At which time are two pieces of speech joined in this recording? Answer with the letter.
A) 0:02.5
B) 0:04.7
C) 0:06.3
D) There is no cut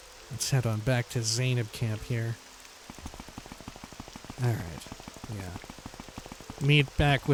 D